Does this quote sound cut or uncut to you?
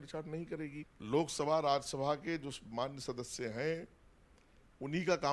cut